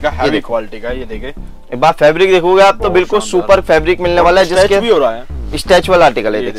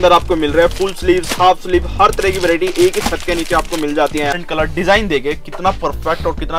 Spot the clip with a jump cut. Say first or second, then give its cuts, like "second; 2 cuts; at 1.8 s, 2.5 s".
second; 1 cut; at 4.4 s